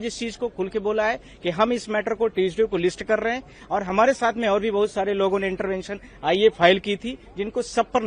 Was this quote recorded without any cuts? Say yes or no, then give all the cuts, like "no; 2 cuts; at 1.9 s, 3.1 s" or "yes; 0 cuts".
yes; 0 cuts